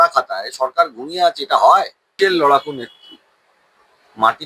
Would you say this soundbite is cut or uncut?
cut